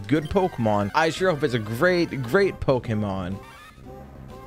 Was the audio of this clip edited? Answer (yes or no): yes